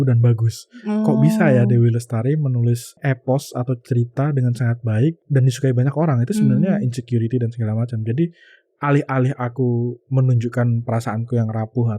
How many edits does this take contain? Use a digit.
2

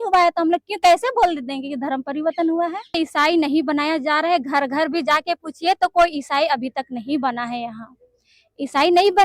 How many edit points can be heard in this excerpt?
1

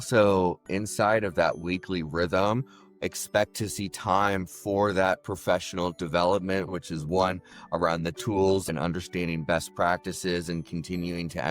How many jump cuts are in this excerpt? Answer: 2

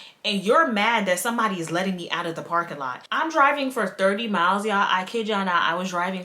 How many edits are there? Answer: 1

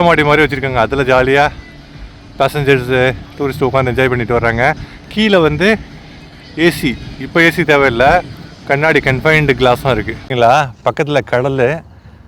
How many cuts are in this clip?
1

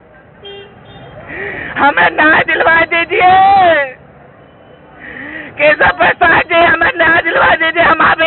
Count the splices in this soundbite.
0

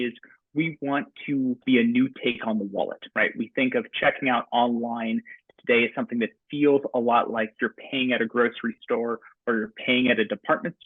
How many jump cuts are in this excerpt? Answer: 1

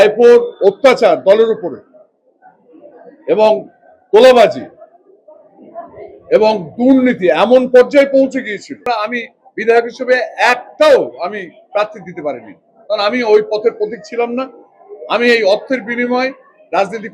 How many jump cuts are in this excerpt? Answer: 1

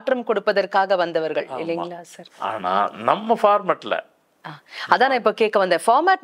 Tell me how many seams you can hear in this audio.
0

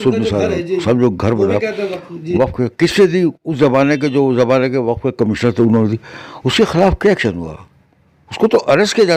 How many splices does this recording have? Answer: 0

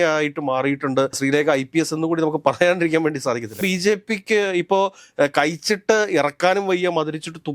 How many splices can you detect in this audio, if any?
1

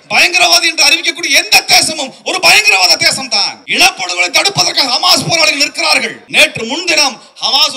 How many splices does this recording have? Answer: 2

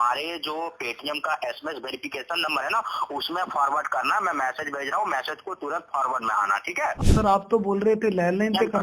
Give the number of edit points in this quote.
1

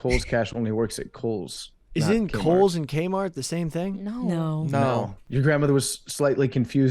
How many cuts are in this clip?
1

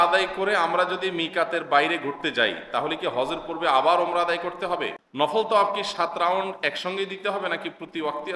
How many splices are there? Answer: 1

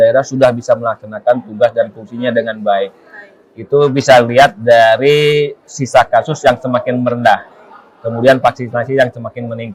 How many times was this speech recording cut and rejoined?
0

